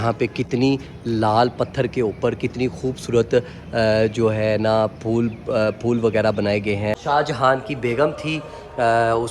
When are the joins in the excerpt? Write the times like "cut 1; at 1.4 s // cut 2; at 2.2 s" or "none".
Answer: cut 1; at 6.9 s

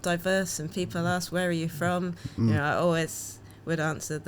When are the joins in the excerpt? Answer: none

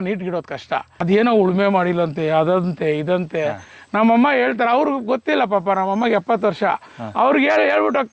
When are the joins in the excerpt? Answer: cut 1; at 0.9 s

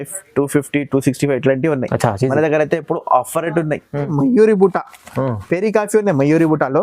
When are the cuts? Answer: cut 1; at 4.1 s

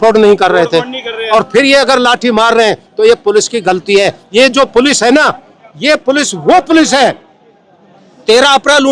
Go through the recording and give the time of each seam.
none

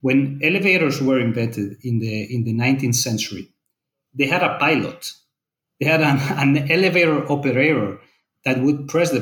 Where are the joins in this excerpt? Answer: none

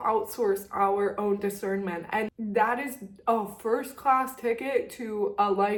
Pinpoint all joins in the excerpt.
none

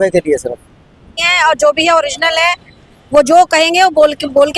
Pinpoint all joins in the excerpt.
cut 1; at 1.2 s

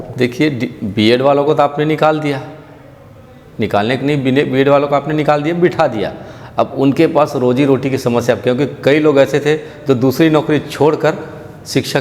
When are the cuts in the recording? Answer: none

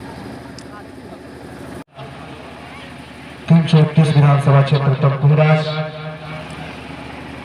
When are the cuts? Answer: cut 1; at 0.9 s

